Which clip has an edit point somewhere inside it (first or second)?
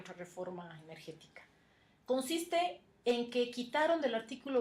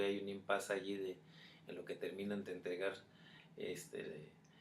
second